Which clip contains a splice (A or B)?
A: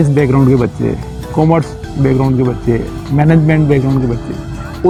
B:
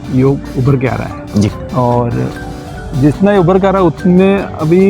B